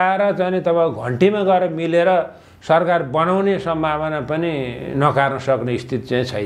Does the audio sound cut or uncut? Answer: uncut